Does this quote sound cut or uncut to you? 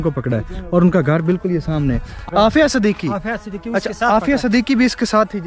cut